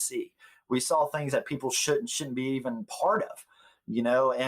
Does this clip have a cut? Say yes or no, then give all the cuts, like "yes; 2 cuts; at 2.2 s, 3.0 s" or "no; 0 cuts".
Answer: no; 0 cuts